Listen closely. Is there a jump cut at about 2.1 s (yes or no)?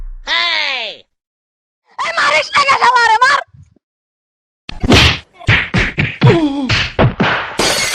yes